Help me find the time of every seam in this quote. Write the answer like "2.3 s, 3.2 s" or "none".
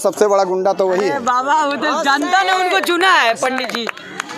none